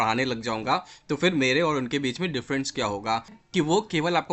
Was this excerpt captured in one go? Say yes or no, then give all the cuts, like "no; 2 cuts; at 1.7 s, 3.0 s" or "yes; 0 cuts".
no; 1 cut; at 3.4 s